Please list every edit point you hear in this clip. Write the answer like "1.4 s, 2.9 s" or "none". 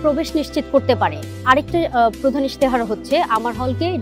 1.3 s